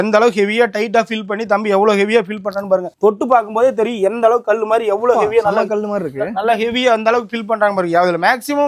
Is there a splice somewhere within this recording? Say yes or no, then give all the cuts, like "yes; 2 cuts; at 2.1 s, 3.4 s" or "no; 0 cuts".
no; 0 cuts